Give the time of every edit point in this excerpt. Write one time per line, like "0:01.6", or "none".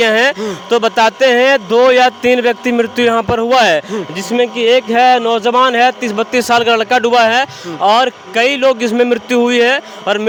none